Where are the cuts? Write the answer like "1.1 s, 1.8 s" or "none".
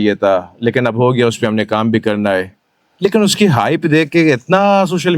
none

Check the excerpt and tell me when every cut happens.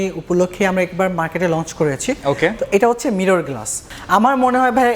3.9 s

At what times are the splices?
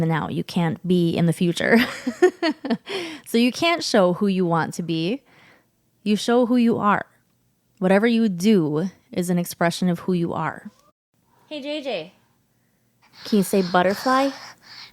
11.1 s

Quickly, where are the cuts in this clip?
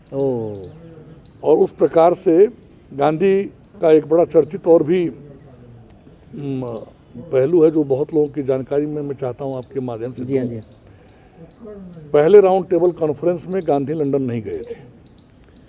none

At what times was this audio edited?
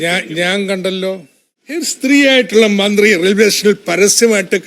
1.9 s

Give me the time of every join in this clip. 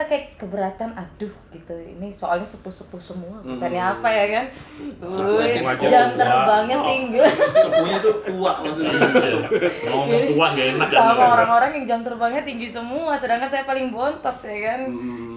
none

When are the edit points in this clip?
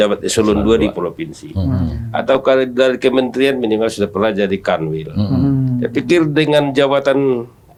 none

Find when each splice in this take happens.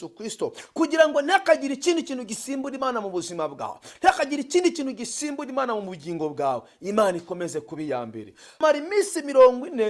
8.6 s

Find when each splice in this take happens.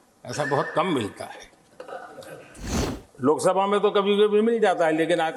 3.0 s

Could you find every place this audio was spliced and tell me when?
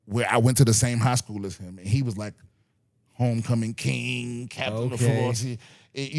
none

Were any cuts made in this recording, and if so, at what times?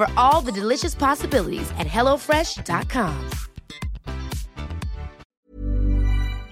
5.2 s

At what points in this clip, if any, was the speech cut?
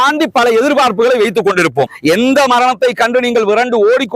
1.9 s

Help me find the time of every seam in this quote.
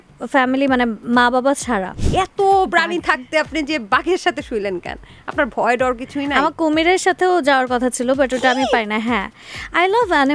2.0 s

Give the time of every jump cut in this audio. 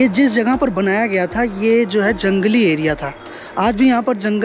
none

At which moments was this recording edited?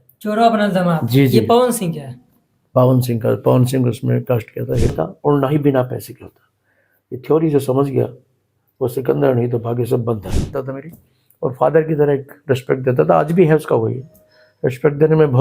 4.9 s, 10.5 s

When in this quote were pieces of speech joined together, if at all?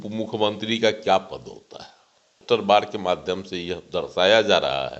2.4 s

